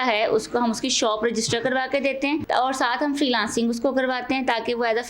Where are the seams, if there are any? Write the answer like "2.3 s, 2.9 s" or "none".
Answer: 2.4 s